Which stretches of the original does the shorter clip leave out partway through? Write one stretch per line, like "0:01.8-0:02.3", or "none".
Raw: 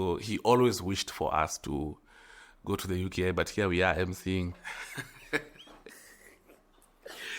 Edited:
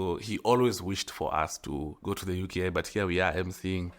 0:01.9-0:02.6